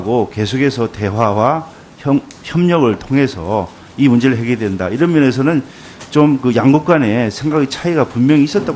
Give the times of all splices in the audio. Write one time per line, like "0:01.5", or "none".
none